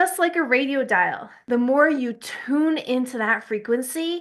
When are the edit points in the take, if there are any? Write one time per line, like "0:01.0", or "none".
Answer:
0:01.3